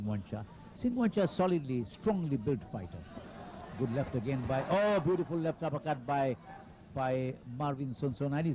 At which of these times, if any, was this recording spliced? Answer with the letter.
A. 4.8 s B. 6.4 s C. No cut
B